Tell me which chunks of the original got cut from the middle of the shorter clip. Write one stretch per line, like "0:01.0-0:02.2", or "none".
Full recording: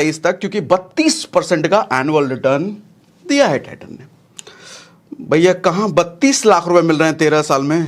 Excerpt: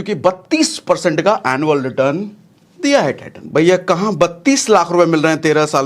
0:03.8-0:05.1